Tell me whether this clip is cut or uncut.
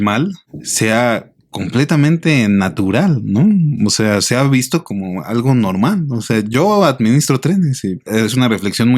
cut